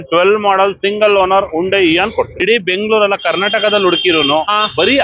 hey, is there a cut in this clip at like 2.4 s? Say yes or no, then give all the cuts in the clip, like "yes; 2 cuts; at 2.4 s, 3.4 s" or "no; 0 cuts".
yes; 1 cut; at 2.4 s